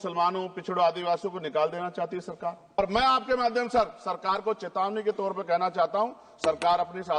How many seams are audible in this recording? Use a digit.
1